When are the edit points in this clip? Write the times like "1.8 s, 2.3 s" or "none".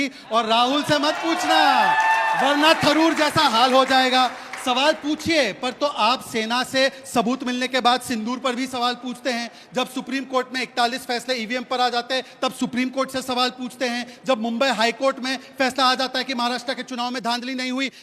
4.5 s